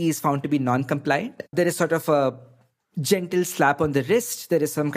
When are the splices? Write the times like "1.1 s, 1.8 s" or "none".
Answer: 1.5 s